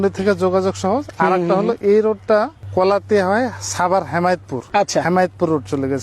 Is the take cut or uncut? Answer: cut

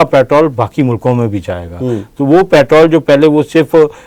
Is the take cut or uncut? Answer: uncut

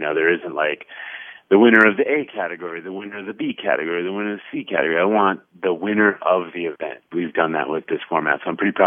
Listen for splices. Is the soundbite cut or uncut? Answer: cut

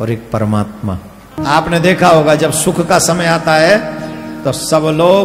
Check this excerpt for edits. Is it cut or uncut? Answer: cut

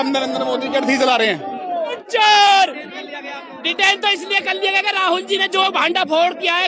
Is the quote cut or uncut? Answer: cut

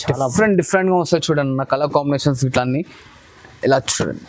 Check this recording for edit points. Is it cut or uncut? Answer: uncut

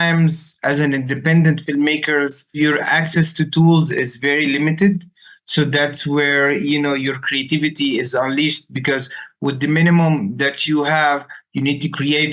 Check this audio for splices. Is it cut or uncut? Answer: cut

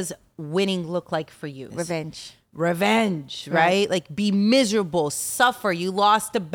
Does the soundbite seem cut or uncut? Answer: cut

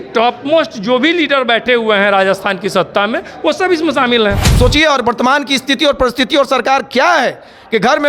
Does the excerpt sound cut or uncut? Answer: cut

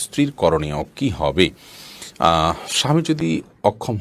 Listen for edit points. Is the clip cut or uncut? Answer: uncut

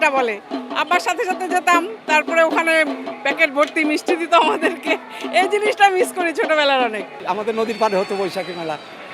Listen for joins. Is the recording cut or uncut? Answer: cut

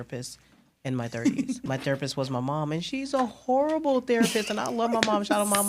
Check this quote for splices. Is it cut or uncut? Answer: cut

